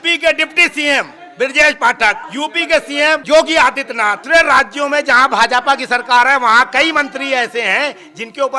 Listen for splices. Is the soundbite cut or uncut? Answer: cut